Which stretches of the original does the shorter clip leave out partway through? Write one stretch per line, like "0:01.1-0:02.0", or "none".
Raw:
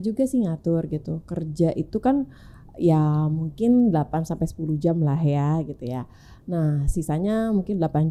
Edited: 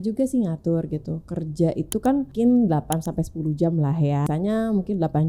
0:02.3-0:03.5
0:05.5-0:07.1